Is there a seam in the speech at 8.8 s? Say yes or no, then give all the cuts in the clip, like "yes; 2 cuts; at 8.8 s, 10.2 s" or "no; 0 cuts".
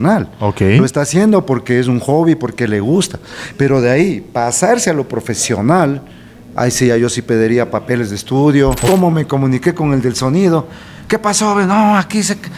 yes; 1 cut; at 8.8 s